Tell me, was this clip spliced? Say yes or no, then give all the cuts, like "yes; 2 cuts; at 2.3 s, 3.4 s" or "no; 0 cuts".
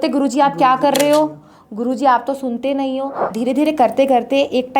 yes; 1 cut; at 3.4 s